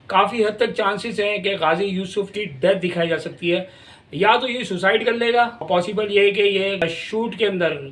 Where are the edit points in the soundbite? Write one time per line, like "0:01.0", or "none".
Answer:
0:05.7
0:06.8